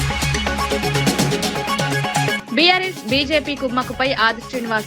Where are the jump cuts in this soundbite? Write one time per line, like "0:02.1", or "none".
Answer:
0:02.3